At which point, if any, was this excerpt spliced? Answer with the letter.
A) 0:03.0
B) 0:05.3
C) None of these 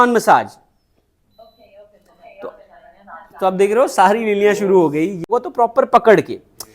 B